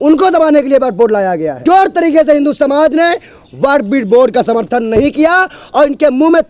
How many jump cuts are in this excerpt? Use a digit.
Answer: 1